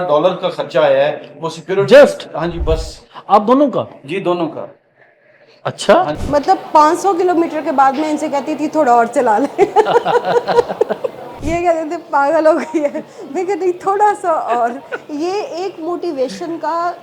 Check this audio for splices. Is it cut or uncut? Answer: cut